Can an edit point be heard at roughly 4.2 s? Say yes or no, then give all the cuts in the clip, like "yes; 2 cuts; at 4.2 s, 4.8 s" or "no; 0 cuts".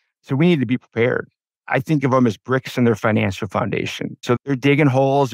yes; 1 cut; at 4.2 s